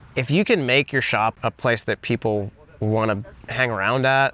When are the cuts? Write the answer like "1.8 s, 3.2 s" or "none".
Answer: 1.4 s, 3.4 s